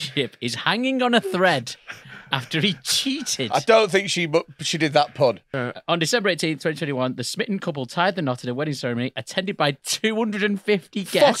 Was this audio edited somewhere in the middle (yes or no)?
yes